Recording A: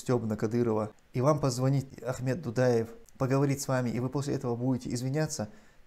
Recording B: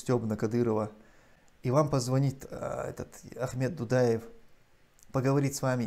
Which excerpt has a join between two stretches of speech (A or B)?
A